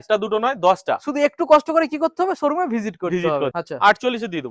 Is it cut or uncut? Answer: cut